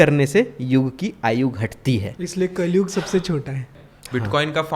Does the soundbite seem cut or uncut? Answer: cut